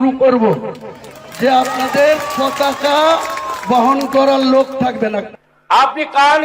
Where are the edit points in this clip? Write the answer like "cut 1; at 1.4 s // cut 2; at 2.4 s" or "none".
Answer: cut 1; at 5.3 s